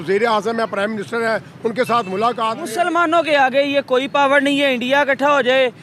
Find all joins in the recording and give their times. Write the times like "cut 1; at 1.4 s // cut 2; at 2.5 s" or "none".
cut 1; at 2.7 s